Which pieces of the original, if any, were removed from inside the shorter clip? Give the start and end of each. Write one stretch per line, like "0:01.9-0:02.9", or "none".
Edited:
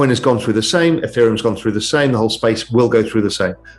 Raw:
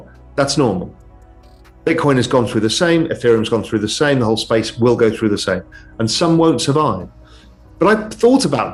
none